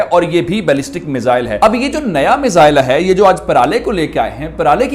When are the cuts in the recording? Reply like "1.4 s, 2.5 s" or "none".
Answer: none

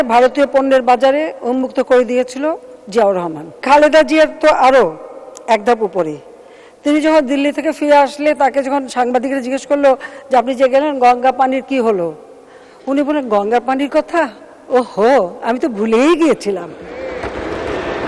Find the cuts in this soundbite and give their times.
3.6 s

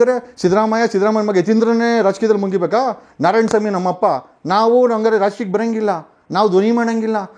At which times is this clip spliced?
none

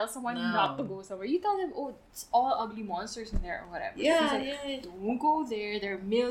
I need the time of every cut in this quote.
none

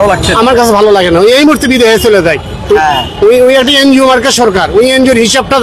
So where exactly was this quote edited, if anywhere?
none

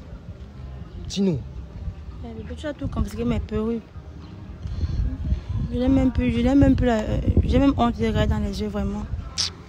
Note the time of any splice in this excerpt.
none

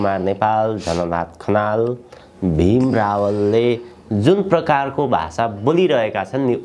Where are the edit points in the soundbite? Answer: none

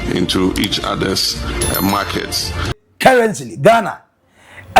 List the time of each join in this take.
2.8 s

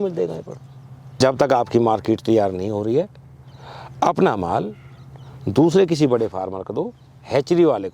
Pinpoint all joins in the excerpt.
1.0 s

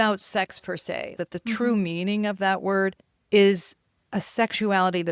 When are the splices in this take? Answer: 1.1 s, 3.1 s

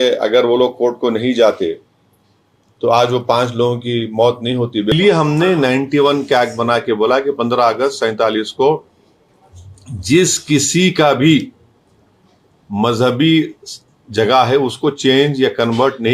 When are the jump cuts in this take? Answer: 4.9 s

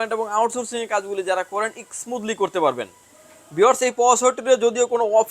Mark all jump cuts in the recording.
none

